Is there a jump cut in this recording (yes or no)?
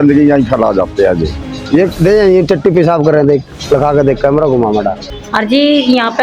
yes